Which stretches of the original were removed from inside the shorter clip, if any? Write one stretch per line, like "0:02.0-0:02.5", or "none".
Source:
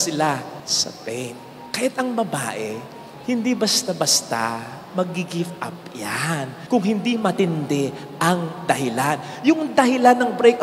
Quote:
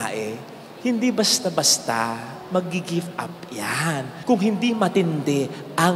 none

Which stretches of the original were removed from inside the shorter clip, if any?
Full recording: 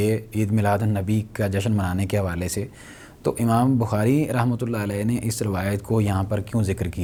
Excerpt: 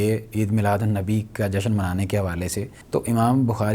0:02.8-0:03.1

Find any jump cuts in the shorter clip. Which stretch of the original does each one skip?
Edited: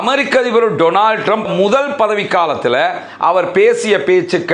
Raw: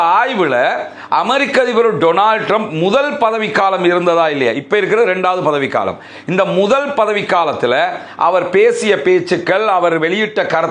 0:02.7-0:06.5

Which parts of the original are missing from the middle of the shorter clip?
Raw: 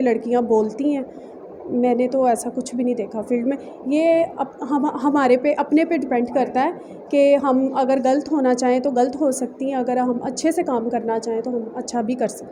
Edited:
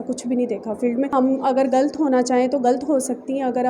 0:03.6-0:07.4

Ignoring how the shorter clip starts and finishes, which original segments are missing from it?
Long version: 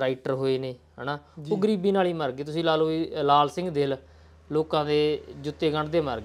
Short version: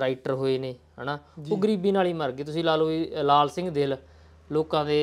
none

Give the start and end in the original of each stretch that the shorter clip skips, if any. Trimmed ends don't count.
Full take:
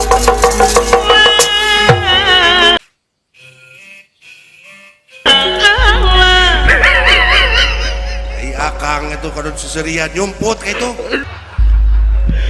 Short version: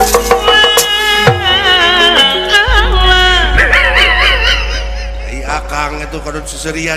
0:02.8-0:05.3

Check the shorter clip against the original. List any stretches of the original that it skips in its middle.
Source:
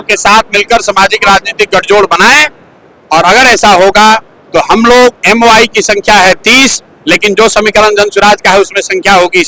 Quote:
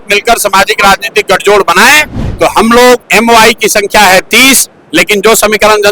0:02.6-0:04.3

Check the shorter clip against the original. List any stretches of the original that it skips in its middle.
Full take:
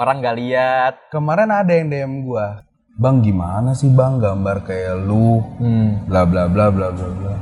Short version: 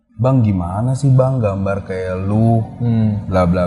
none

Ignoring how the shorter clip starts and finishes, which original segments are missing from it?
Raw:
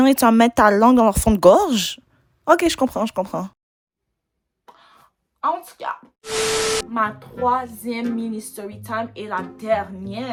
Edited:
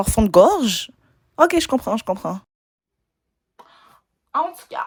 none

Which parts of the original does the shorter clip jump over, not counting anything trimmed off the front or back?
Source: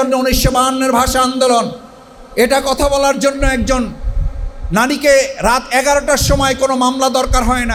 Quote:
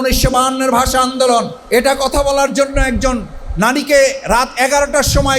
0:01.8-0:02.2
0:04.0-0:04.5

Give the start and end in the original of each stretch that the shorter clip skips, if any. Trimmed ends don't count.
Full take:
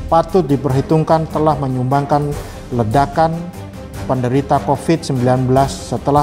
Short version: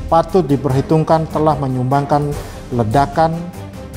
none

